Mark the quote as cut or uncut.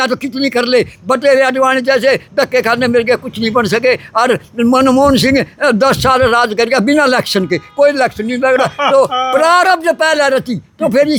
uncut